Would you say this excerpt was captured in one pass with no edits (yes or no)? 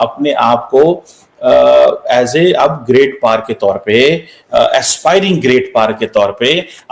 yes